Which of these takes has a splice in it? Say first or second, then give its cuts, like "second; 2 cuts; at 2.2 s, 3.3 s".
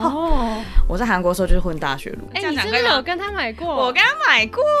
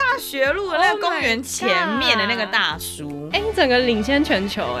first; 1 cut; at 2.2 s